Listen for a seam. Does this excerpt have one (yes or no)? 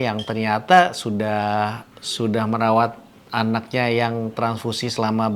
no